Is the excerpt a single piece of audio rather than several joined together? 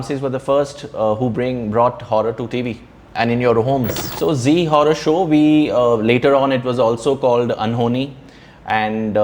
no; 1 cut; at 4.0 s

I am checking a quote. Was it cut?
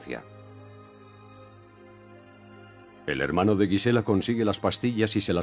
yes; 1 cut; at 3.0 s

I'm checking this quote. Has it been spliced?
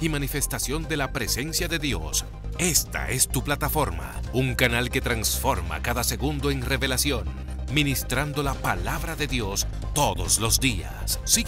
no; 0 cuts

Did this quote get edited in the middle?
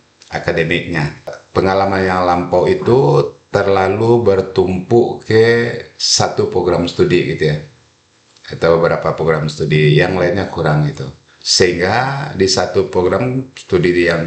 yes; 1 cut; at 1.4 s

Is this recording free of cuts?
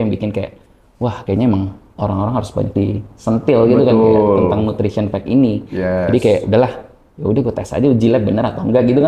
yes; 0 cuts

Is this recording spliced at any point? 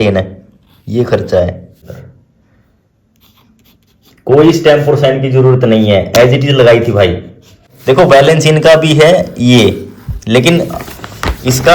yes; 2 cuts; at 1.9 s, 7.7 s

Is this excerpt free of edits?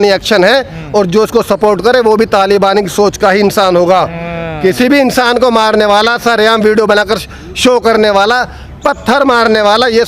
yes; 0 cuts

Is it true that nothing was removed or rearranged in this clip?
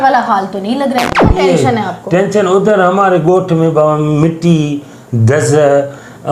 no; 1 cut; at 1.3 s

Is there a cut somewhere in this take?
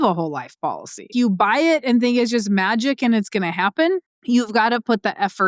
yes; 2 cuts; at 1.1 s, 4.1 s

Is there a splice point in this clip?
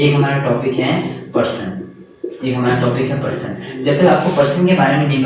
no; 0 cuts

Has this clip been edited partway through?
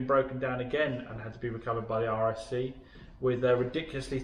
no; 0 cuts

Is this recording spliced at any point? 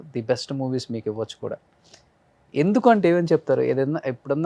no; 0 cuts

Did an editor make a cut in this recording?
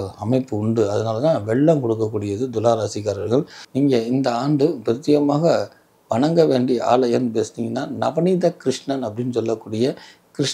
yes; 1 cut; at 3.6 s

